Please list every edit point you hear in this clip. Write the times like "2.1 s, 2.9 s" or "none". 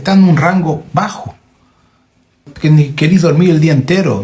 2.5 s